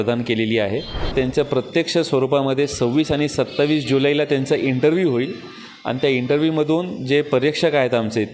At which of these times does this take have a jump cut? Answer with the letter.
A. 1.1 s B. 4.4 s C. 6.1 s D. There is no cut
A